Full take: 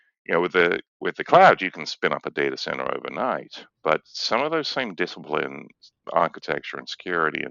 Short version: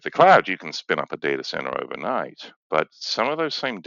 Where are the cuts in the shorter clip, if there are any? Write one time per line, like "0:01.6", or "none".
none